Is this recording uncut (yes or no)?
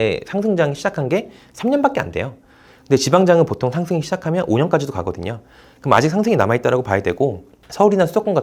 yes